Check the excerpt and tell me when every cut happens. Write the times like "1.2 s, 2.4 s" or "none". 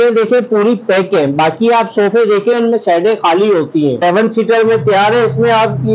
4.0 s